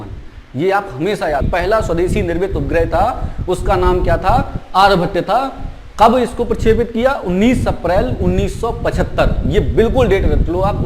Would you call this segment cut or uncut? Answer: cut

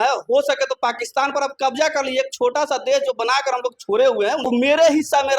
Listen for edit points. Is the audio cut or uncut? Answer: cut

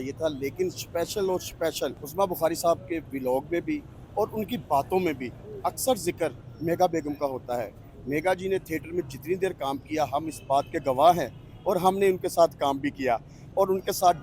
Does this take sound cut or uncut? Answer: uncut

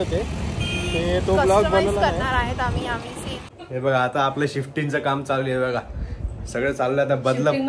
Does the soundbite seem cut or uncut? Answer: cut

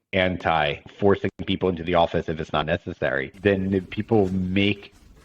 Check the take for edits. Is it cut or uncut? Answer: cut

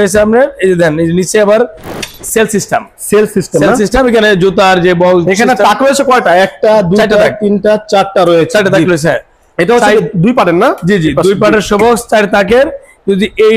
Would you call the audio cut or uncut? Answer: uncut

